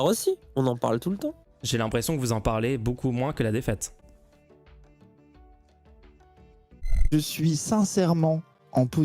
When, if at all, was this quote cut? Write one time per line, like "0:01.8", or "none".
0:01.5
0:07.1

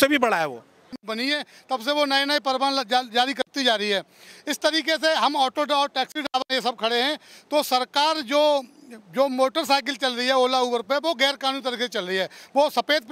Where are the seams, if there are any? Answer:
0:01.0

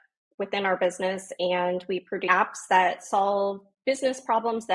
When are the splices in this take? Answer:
0:02.2

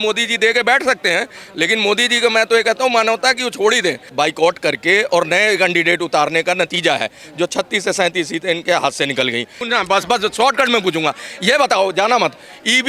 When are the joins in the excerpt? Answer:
0:04.0
0:09.5

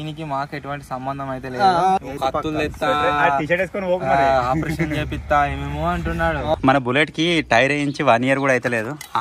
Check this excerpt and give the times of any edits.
0:02.0
0:06.5

